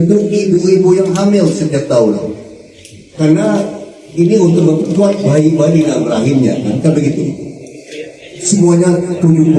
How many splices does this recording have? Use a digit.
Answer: 0